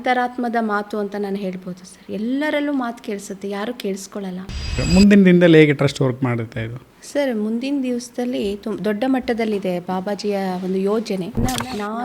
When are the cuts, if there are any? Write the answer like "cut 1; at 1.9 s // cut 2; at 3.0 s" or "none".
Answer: cut 1; at 4.8 s // cut 2; at 11.4 s

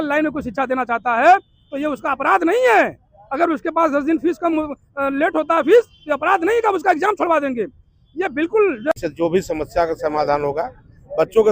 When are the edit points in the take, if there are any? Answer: cut 1; at 8.9 s

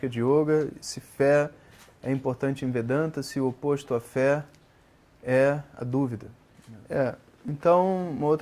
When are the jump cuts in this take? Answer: cut 1; at 6.7 s

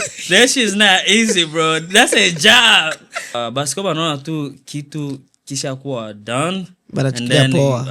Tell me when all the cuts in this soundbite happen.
cut 1; at 3.4 s

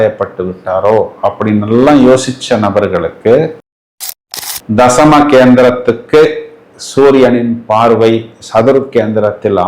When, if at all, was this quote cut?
cut 1; at 4.1 s

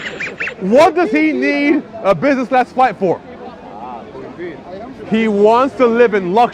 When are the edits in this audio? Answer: none

